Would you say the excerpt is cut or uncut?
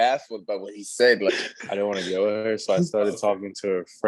cut